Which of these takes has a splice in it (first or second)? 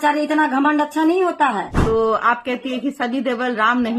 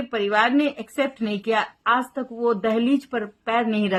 first